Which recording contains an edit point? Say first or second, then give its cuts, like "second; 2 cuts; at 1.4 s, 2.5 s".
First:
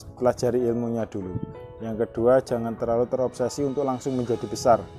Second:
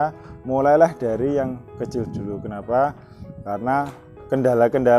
second; 1 cut; at 4.1 s